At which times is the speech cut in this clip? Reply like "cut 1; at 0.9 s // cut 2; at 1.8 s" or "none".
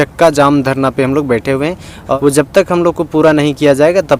cut 1; at 2.2 s